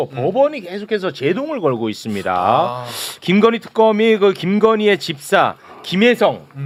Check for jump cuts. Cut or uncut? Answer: uncut